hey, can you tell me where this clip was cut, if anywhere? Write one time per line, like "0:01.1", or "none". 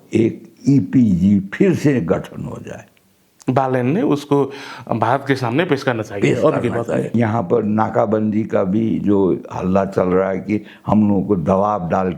0:07.1

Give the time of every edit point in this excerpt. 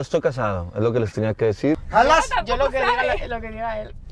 0:01.8

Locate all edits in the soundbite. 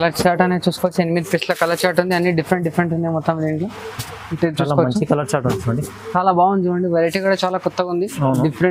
none

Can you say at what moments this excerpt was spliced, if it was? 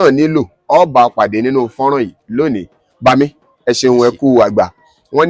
none

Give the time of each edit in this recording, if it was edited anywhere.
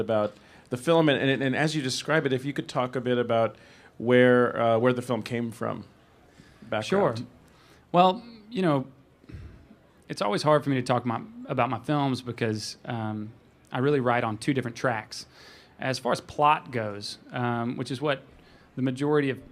0:17.5

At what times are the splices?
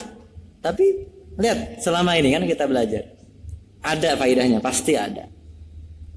none

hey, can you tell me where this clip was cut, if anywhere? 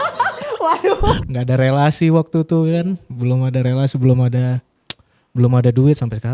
0:01.2

